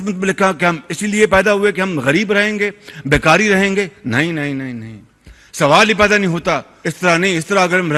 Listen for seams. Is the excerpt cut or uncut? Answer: uncut